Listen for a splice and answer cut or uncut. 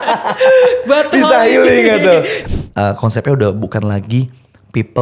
cut